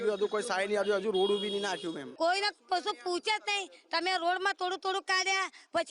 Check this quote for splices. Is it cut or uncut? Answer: cut